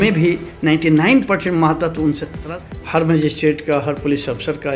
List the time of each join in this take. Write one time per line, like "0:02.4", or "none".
0:02.3

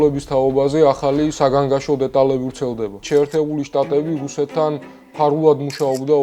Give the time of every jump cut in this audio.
0:03.0

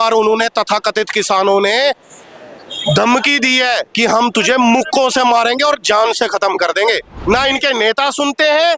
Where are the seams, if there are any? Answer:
0:07.1

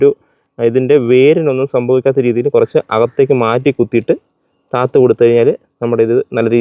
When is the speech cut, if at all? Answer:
none

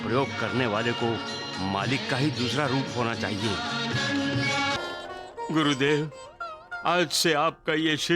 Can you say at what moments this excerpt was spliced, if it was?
0:04.8

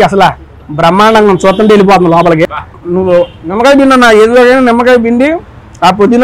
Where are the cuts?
0:02.6

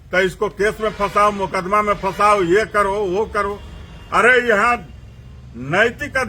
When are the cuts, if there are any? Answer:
none

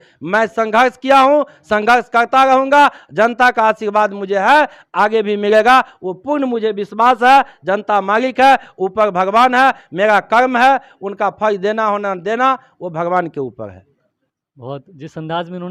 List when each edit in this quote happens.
none

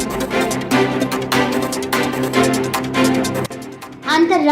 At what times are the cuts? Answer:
0:03.5

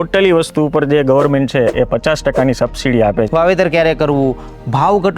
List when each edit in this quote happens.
0:03.3

